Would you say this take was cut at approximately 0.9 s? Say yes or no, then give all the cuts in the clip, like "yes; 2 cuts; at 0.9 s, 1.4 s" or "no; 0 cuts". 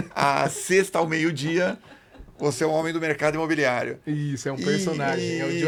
no; 0 cuts